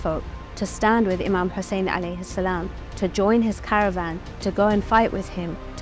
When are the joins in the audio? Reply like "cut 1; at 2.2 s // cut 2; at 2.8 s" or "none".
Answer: none